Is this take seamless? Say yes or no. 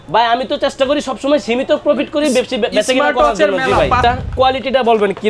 no